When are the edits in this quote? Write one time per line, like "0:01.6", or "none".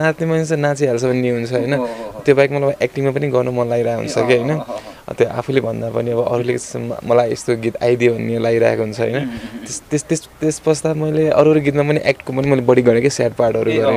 none